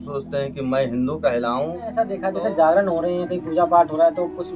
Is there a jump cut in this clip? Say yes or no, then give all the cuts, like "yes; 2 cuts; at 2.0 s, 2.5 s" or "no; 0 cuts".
yes; 1 cut; at 2.2 s